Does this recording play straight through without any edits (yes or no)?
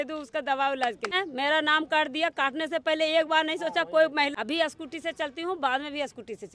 no